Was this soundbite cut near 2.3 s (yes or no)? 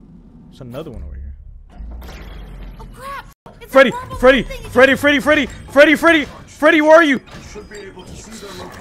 yes